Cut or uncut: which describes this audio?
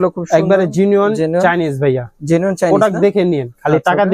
uncut